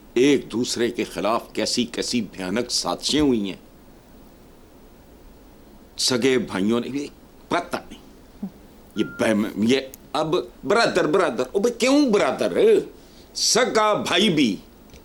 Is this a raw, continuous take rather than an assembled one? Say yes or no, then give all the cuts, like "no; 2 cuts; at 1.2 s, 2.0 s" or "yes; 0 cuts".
yes; 0 cuts